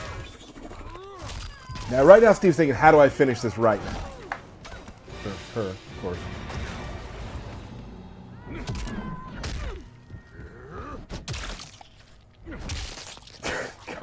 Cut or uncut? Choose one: cut